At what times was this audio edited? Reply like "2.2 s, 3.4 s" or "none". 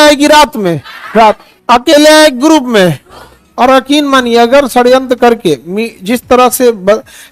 1.5 s, 3.0 s